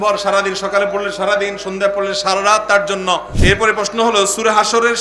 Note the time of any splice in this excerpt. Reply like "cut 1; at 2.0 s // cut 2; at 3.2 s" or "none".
cut 1; at 3.3 s